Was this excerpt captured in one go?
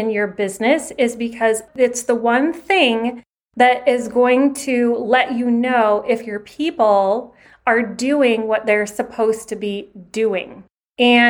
no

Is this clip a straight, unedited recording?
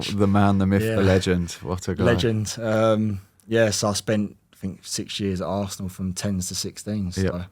yes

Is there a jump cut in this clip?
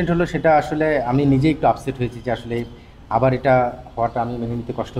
no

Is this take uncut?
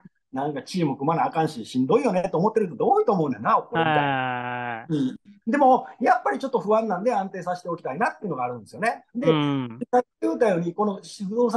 yes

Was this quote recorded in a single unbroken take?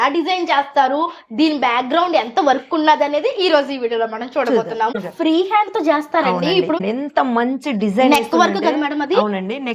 no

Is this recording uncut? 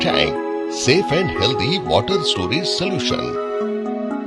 yes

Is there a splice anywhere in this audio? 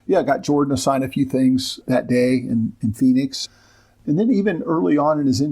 yes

